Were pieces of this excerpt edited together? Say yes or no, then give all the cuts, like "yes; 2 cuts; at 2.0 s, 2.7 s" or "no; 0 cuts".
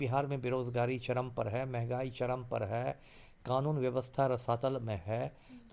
no; 0 cuts